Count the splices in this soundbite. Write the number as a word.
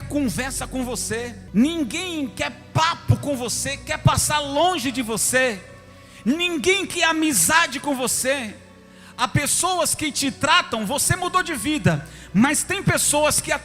one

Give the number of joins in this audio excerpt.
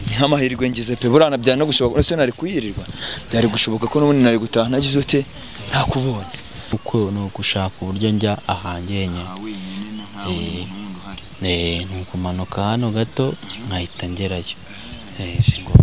one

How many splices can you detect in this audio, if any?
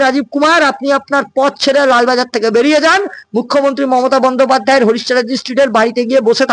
zero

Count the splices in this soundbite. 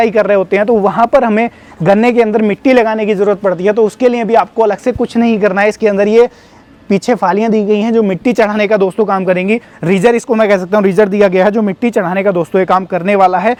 zero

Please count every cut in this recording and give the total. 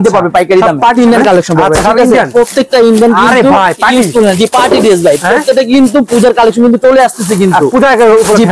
one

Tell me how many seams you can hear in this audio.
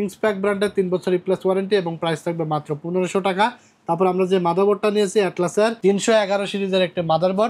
zero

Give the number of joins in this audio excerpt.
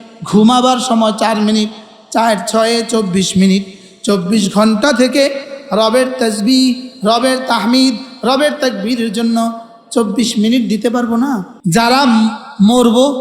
one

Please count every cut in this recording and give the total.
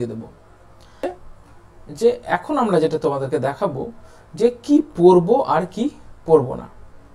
one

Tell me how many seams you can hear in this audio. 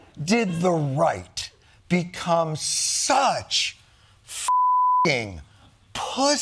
zero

